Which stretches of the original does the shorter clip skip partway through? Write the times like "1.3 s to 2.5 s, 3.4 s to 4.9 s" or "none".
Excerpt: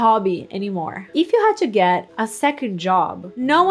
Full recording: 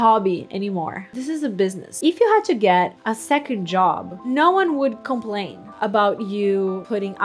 1.0 s to 1.9 s